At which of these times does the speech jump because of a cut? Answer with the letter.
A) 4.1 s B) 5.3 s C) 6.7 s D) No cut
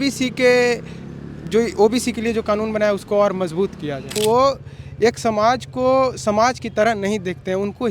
A